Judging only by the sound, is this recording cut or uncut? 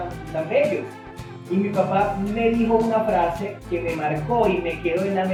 uncut